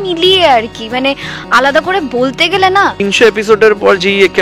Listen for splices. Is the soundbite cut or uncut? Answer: cut